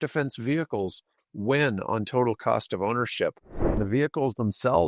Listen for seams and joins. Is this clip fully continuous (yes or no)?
no